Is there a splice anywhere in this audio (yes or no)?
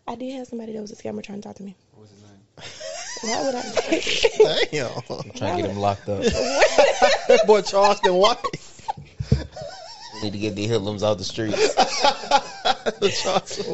no